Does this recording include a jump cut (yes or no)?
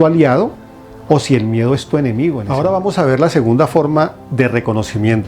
yes